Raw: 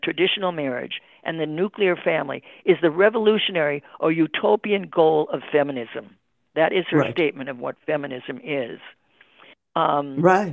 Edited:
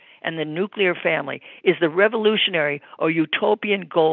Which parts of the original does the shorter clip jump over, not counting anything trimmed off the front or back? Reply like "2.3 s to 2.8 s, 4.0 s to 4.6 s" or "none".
none